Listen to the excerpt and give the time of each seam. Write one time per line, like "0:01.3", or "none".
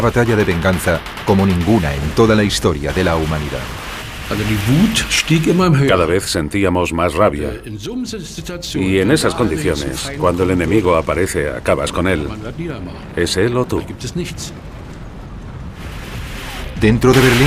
0:09.8

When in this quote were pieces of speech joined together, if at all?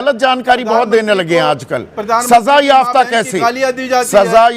none

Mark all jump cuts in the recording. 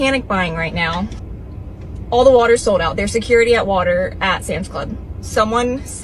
0:01.2

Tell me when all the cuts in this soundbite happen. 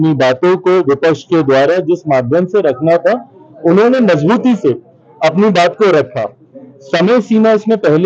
none

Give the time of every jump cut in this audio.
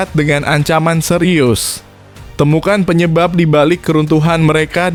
none

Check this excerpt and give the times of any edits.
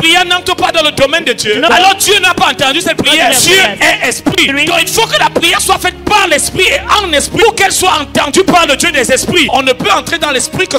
0:01.7
0:03.3
0:04.5
0:07.4
0:09.5

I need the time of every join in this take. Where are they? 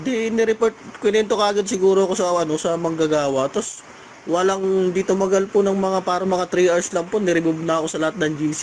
none

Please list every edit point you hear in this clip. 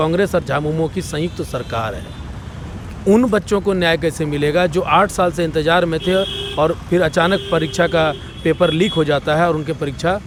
none

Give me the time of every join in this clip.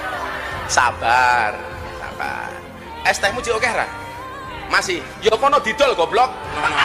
0:02.9

